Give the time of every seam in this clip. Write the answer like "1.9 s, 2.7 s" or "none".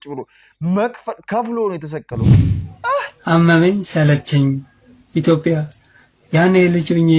2.4 s